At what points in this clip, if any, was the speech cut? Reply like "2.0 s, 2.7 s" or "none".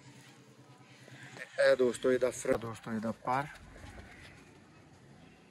2.5 s